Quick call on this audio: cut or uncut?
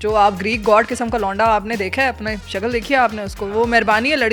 uncut